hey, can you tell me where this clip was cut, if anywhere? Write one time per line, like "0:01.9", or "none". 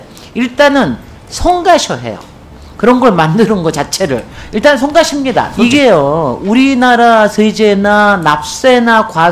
0:05.5

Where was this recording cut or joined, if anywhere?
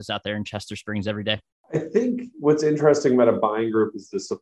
0:01.5

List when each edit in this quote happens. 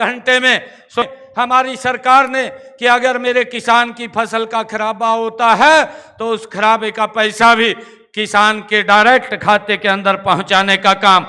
0:01.1

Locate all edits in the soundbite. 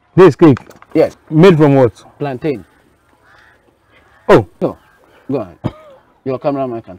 none

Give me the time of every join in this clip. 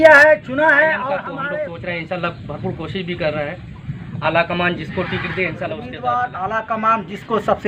0:01.4
0:05.9

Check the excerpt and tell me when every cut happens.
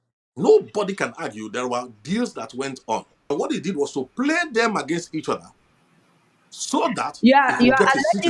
0:03.3

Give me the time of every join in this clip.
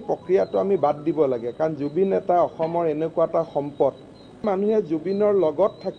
0:04.4

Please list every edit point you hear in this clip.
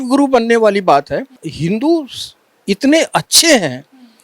0:01.5

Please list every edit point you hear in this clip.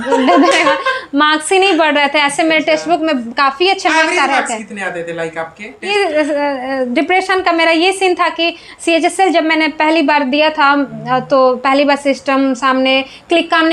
0:05.9

